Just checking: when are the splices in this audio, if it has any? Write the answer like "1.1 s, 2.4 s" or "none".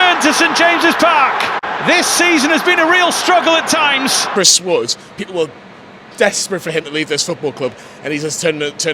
4.2 s